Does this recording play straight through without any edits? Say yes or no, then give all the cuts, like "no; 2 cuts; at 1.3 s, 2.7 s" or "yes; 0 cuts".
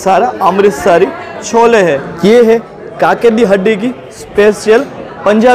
no; 1 cut; at 2.1 s